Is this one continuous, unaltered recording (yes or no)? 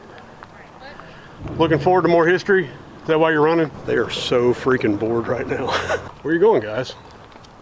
no